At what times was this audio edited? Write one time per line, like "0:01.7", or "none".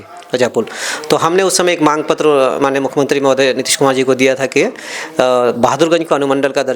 none